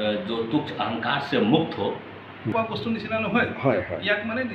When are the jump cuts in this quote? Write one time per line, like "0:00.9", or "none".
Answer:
0:02.5